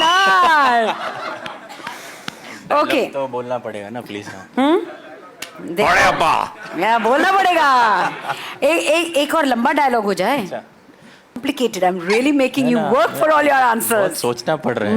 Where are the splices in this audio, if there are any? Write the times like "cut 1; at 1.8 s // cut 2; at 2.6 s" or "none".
cut 1; at 11.4 s